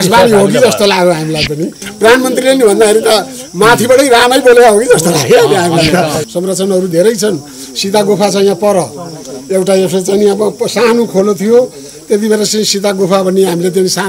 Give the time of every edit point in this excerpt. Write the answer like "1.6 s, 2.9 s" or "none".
1.8 s, 6.3 s